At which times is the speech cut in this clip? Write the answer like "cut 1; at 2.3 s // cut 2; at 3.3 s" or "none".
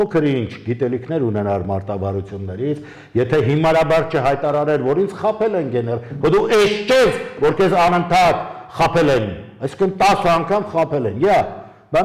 none

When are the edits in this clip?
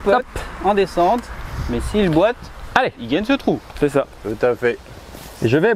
none

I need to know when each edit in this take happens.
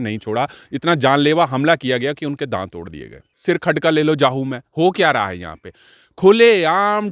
cut 1; at 3.3 s

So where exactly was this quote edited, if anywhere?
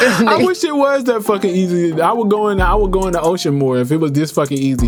none

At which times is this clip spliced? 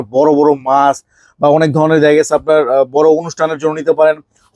none

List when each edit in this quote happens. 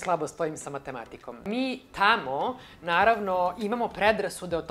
cut 1; at 1.4 s

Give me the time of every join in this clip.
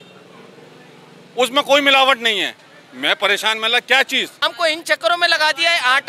cut 1; at 4.3 s

